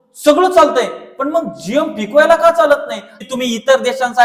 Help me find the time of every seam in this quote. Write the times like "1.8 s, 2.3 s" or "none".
3.1 s